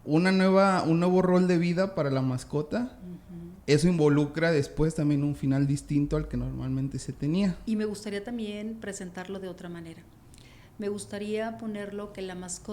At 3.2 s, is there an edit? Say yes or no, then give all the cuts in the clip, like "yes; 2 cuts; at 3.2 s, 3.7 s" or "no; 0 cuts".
no; 1 cut; at 7.6 s